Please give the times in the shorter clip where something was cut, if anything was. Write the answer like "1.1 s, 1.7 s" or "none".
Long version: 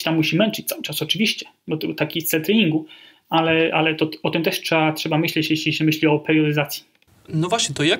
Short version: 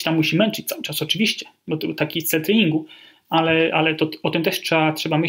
none